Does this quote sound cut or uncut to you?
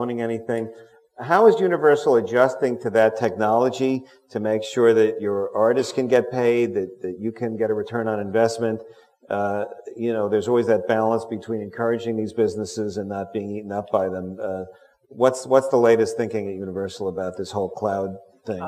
uncut